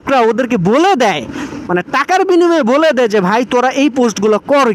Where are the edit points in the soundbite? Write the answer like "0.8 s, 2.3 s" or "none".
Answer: none